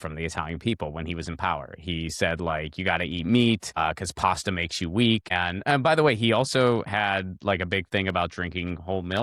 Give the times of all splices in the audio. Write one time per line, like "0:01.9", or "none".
0:03.8
0:05.3